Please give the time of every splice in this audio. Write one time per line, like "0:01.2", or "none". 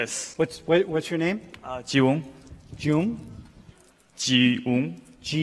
none